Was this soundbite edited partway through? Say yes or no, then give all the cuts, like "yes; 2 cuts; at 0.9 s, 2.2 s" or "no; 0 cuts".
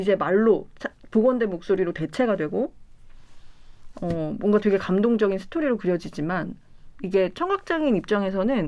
no; 0 cuts